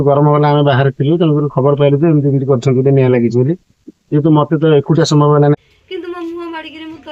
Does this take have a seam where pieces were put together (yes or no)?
yes